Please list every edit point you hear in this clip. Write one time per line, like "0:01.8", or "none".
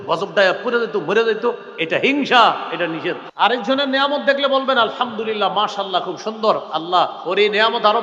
0:03.3